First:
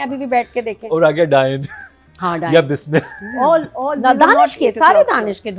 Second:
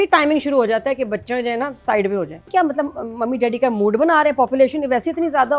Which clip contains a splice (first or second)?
second